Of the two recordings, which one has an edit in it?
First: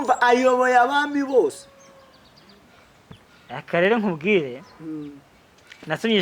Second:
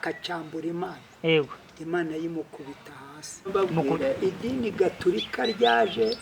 second; 1 cut; at 3.5 s

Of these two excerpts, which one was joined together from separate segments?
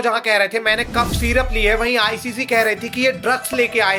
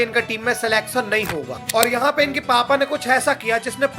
second; 1 cut; at 1.6 s

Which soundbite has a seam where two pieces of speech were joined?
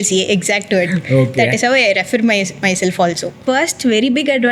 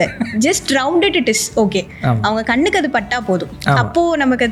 first; 1 cut; at 3.4 s

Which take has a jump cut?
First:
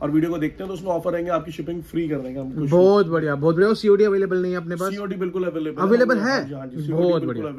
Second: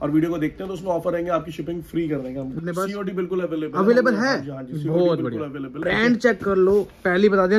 second; 2 cuts; at 2.6 s, 5.8 s

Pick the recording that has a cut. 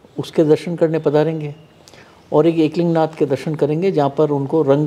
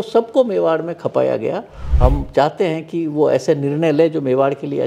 second; 1 cut; at 1.8 s

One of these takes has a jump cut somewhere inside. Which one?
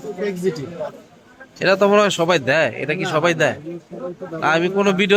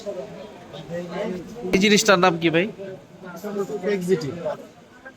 second; 1 cut; at 1.7 s

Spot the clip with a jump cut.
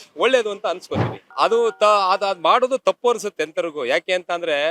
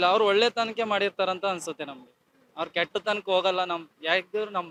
first; 1 cut; at 1.3 s

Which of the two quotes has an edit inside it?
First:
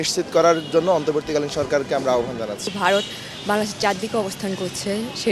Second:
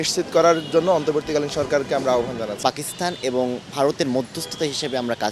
second; 1 cut; at 2.6 s

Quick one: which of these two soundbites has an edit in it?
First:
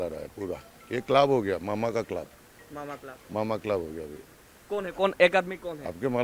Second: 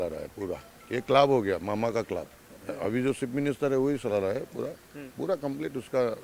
second; 1 cut; at 2.6 s

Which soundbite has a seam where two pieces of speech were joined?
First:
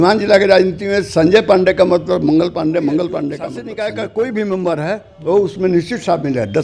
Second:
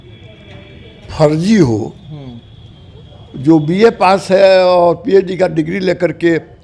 first; 1 cut; at 3.6 s

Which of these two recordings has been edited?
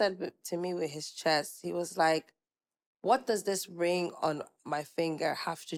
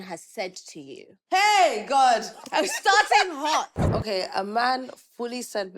second; 1 cut; at 3.8 s

